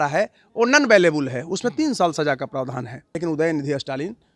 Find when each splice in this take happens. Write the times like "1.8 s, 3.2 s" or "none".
3.0 s